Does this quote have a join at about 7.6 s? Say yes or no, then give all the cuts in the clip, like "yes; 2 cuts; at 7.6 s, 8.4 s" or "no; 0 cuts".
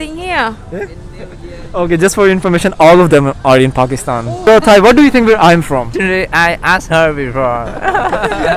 no; 2 cuts; at 4.4 s, 5.9 s